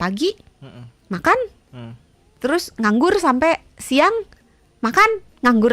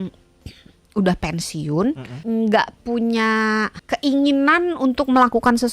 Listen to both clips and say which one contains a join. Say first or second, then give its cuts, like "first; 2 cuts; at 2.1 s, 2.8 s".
second; 2 cuts; at 2.1 s, 3.8 s